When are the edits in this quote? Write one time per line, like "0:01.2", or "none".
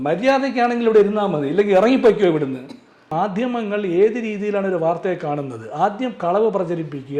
0:02.5

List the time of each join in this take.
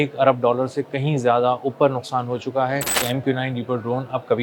0:03.0

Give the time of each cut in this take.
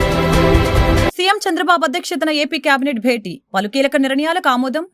0:01.1

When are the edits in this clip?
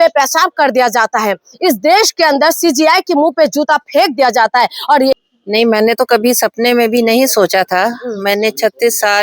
0:05.1

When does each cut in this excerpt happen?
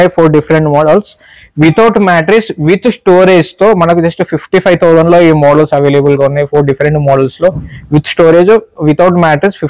none

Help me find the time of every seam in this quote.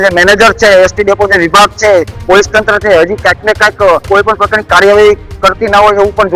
0:04.0

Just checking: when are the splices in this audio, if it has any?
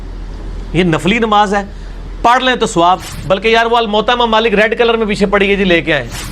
0:03.1

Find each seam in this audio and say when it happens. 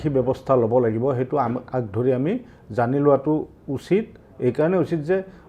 none

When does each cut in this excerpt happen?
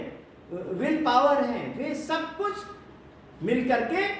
none

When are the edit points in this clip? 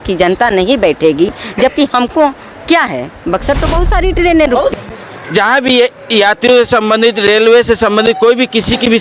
0:04.7

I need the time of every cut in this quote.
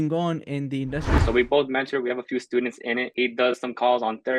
0:01.1
0:03.1

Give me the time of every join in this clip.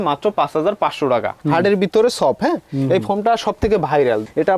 0:01.4

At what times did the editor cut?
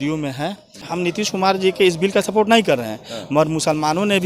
0:01.2

